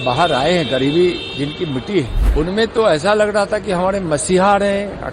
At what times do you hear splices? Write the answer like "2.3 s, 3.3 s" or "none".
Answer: 2.2 s